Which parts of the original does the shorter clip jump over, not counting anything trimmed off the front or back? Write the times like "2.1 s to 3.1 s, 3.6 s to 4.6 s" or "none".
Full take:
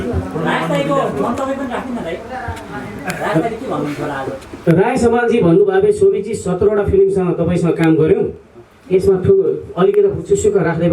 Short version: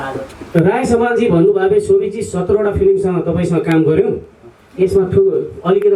none